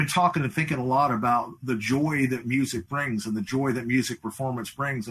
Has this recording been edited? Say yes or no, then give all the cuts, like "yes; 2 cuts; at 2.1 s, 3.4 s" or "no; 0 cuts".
no; 0 cuts